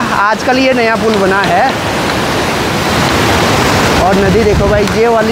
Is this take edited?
no; 0 cuts

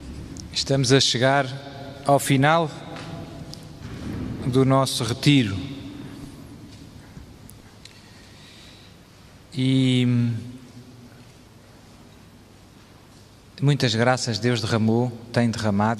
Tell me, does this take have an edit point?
yes; 1 cut; at 10.3 s

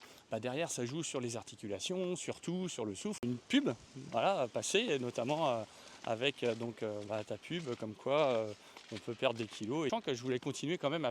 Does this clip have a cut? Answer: yes; 2 cuts; at 3.2 s, 9.9 s

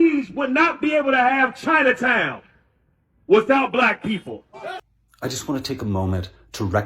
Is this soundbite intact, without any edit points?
no; 1 cut; at 4.8 s

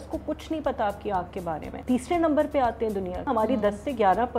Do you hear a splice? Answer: yes; 2 cuts; at 1.7 s, 3.2 s

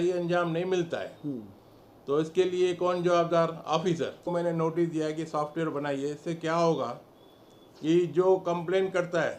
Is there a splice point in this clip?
yes; 1 cut; at 4.3 s

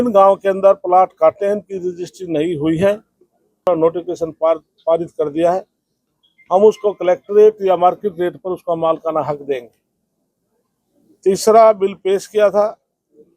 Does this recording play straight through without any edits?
no; 1 cut; at 3.6 s

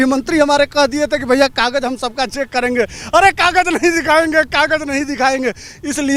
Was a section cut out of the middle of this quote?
no; 0 cuts

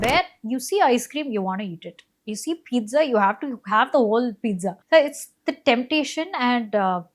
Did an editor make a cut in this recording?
yes; 1 cut; at 4.7 s

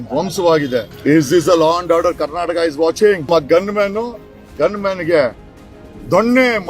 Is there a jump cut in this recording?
yes; 2 cuts; at 0.9 s, 3.3 s

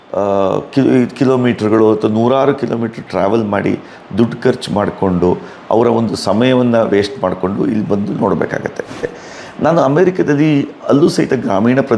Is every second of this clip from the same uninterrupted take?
no; 1 cut; at 9.2 s

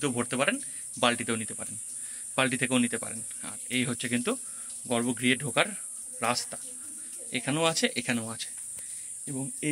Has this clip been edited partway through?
no; 0 cuts

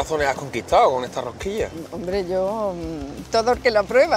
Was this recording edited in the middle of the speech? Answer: no; 0 cuts

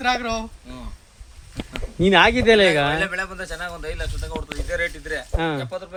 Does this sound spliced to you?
no; 0 cuts

